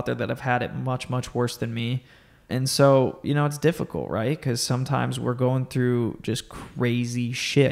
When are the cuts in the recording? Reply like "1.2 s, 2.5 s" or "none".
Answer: none